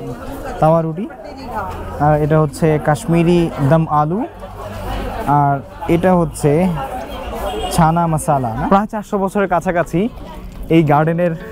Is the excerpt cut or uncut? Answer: cut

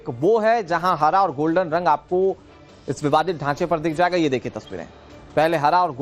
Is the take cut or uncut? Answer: uncut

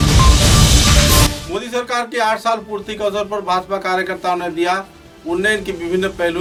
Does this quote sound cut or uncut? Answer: uncut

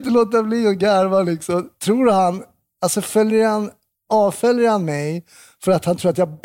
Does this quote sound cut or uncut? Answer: uncut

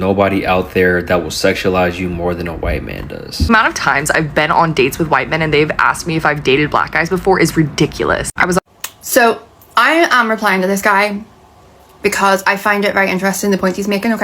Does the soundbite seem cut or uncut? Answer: cut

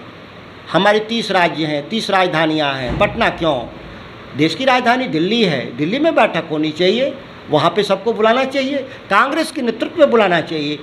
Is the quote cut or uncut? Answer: uncut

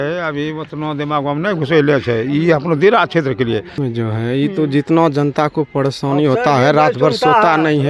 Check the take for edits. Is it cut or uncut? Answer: cut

